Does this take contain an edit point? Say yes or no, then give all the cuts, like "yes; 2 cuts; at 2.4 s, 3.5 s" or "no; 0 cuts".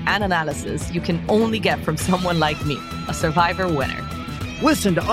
no; 0 cuts